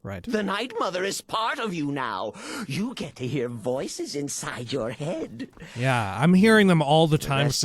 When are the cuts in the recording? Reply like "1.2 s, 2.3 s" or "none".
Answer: 5.6 s